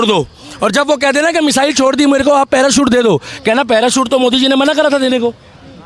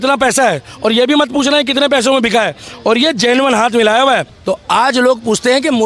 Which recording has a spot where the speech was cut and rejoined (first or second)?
second